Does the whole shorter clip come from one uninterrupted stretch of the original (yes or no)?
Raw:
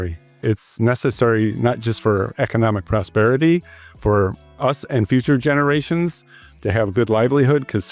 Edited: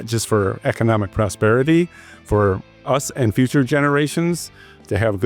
yes